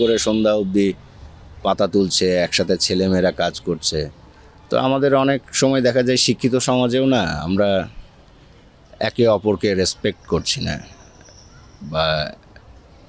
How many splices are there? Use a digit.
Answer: 0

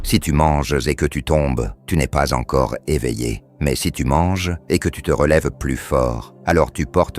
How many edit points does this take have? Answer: 4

